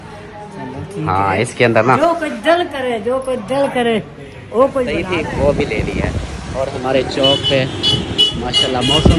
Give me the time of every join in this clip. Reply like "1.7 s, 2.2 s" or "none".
5.0 s